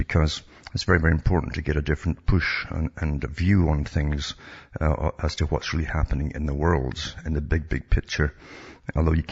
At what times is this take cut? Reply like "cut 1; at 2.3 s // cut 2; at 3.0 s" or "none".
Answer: cut 1; at 1.3 s